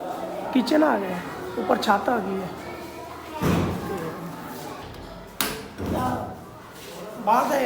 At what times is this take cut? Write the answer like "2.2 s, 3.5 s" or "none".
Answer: 4.8 s